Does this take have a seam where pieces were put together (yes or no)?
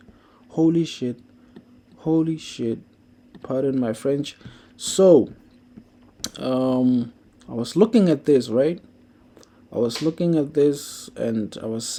no